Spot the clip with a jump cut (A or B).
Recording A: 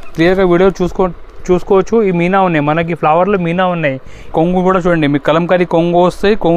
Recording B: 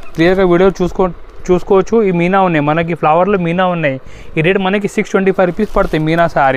A